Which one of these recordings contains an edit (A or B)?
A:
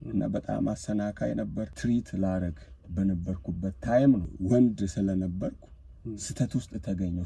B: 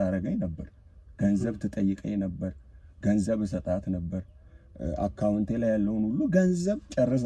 A